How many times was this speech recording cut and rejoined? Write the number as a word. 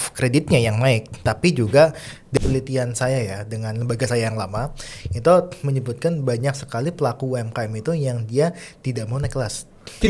one